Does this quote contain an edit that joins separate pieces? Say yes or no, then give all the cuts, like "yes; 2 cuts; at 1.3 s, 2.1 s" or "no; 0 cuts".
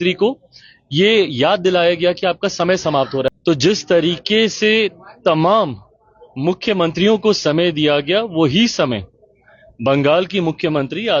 yes; 1 cut; at 3.3 s